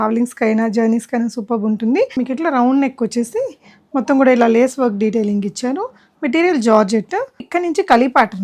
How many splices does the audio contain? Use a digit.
2